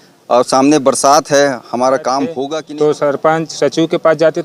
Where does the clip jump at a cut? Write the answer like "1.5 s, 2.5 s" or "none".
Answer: 2.5 s